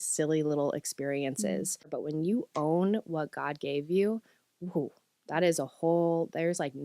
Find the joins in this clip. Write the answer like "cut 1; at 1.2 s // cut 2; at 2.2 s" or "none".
cut 1; at 2.0 s